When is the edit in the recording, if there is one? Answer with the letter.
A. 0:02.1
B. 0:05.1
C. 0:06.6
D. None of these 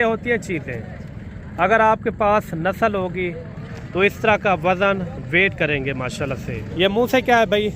C